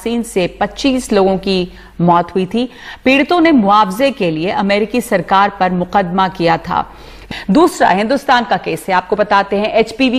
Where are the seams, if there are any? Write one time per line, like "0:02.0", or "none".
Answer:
0:07.2